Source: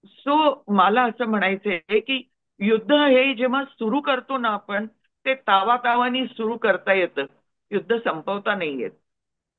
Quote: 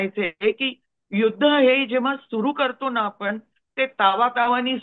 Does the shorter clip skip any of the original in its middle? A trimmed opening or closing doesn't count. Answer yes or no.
no